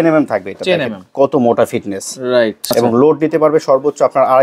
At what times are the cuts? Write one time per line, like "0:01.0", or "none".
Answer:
0:02.6